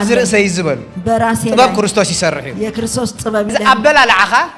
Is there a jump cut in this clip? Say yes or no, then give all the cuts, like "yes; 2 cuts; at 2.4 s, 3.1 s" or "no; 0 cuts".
yes; 1 cut; at 3.5 s